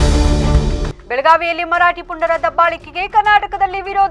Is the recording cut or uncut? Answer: cut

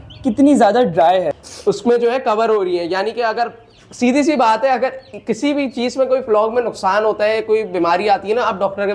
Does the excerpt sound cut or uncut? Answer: cut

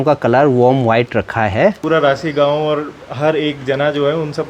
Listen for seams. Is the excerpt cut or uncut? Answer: cut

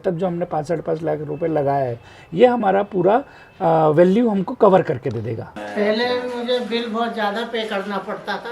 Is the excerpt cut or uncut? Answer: cut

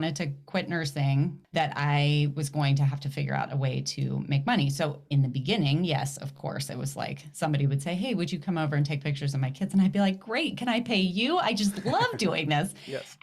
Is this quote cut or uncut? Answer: cut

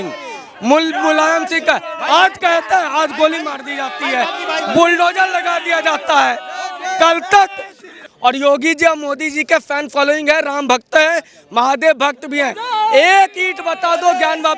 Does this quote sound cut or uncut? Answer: cut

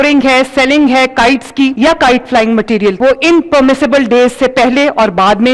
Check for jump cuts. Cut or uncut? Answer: cut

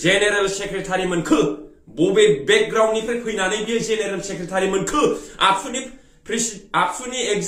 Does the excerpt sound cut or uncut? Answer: uncut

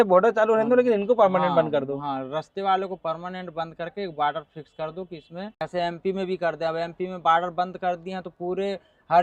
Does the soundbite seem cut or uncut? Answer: uncut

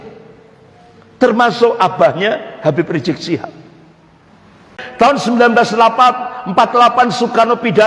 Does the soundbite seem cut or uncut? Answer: cut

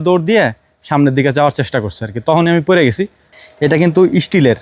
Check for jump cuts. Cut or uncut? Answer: cut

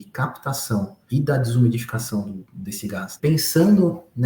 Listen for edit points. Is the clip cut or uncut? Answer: cut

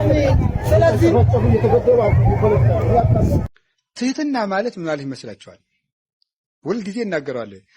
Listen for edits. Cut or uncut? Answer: cut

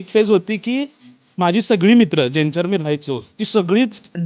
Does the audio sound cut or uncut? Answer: uncut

